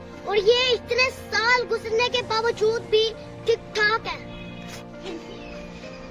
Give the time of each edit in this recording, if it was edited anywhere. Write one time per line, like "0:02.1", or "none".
none

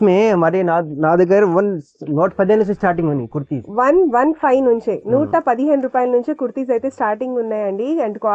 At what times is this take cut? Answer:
none

